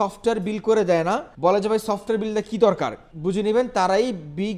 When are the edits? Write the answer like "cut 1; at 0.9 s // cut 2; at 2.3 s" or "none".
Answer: cut 1; at 1.3 s // cut 2; at 3.1 s